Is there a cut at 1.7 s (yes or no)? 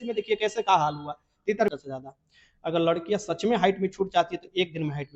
yes